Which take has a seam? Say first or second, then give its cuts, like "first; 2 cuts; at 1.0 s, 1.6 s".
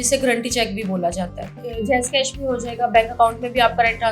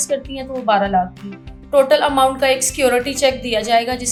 first; 1 cut; at 1.5 s